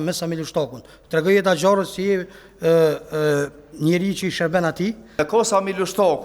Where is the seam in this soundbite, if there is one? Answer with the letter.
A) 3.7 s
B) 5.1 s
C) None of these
B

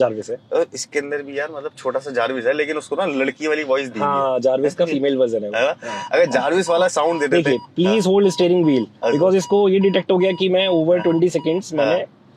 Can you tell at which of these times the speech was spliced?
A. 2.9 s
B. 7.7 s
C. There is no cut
C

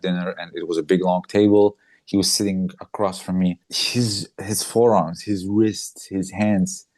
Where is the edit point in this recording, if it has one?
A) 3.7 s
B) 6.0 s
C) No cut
A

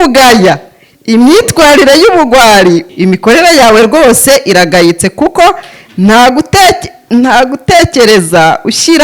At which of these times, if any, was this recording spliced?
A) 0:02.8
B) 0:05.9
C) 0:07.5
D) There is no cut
A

